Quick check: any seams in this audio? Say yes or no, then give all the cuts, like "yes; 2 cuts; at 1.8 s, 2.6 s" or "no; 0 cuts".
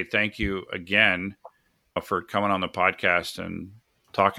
yes; 1 cut; at 2.0 s